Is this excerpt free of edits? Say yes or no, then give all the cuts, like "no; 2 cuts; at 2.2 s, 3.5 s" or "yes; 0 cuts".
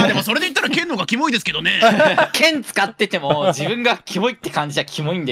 no; 1 cut; at 2.3 s